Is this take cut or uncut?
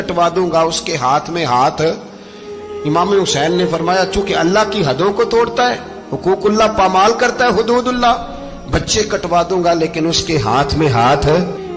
uncut